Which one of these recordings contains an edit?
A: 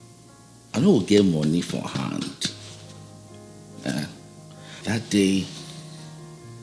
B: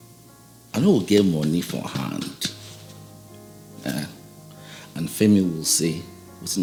A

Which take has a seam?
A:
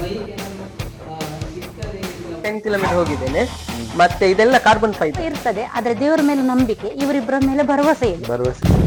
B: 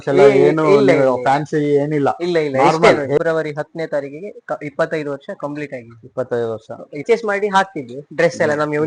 B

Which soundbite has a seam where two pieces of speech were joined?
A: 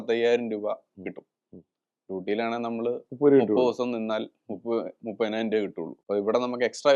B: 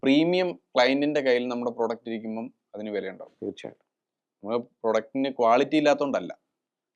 A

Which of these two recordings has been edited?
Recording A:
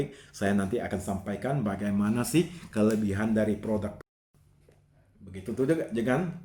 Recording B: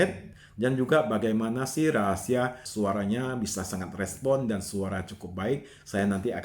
B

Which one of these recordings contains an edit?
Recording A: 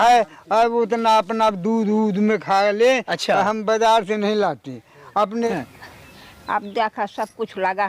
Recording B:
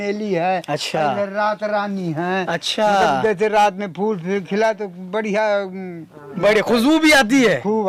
A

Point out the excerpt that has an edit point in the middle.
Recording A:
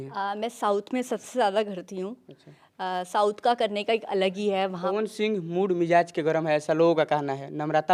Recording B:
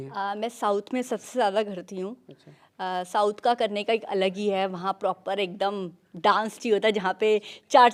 A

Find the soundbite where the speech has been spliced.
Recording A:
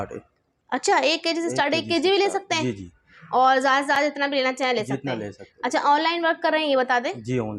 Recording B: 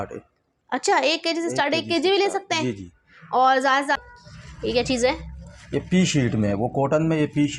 B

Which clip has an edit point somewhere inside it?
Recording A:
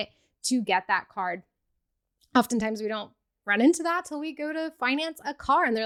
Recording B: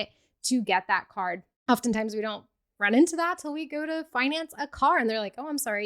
B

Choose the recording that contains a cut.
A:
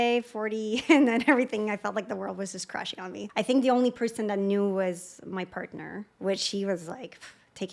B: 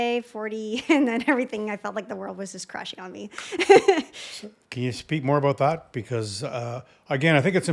A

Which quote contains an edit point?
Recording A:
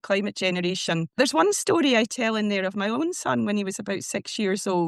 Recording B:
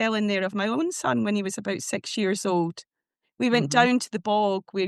A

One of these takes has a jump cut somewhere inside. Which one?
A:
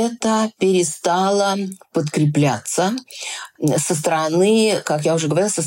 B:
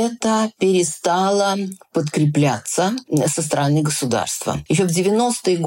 B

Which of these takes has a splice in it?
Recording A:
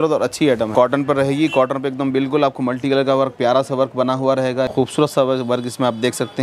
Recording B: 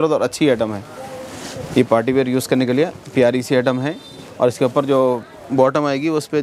A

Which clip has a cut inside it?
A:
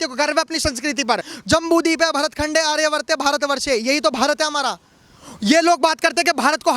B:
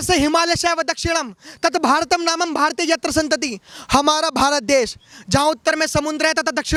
A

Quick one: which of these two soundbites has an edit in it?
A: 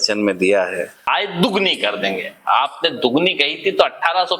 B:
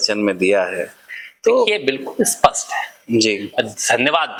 A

